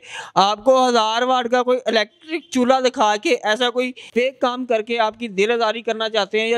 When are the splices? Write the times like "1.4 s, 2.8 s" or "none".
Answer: 4.0 s